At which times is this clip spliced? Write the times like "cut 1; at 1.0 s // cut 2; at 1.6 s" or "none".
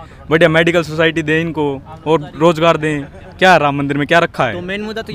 none